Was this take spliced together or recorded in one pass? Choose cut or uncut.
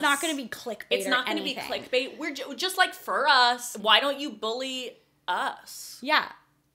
cut